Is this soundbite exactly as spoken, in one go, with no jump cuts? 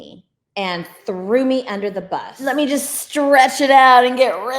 no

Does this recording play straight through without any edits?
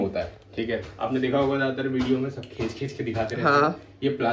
yes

